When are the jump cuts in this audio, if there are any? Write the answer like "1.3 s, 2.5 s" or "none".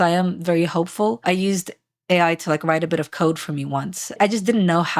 1.2 s, 4.2 s